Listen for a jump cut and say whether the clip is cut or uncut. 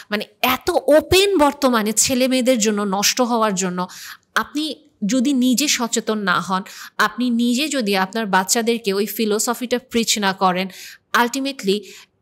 uncut